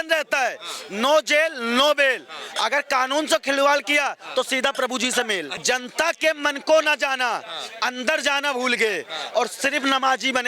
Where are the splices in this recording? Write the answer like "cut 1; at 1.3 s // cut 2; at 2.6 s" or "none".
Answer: cut 1; at 5.6 s